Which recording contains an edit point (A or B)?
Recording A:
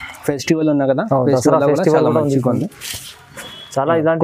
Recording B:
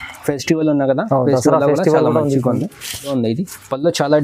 B